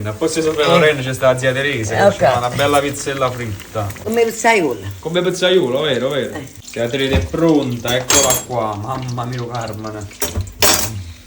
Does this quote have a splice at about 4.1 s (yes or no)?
yes